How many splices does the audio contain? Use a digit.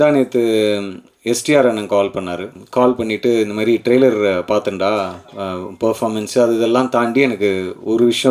1